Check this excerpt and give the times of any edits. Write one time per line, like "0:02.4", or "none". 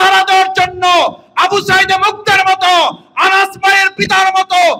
none